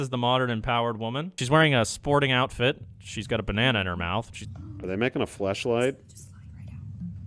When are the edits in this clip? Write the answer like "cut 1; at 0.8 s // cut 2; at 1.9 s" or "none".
none